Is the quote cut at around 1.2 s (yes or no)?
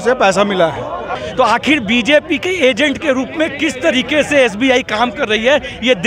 yes